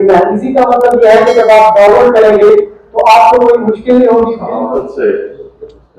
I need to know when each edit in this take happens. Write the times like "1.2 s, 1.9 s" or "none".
4.5 s